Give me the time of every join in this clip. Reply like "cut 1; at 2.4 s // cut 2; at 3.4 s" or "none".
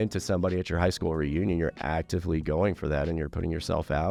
none